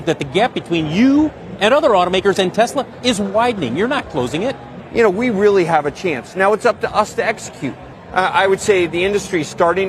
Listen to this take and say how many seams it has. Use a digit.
2